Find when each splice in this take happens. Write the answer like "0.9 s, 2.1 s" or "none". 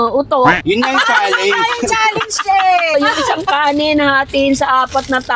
2.9 s

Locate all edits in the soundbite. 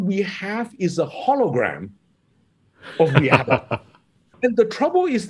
4.3 s

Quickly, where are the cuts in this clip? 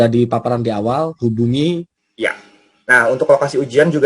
2.0 s

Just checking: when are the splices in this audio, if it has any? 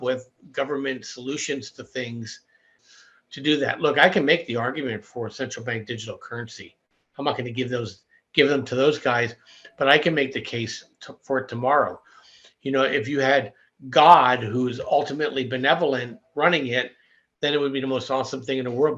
2.8 s

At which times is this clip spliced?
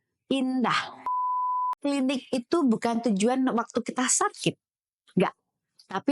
1.5 s

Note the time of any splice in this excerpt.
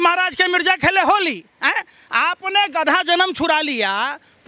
none

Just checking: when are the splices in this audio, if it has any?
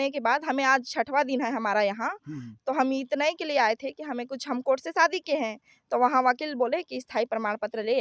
none

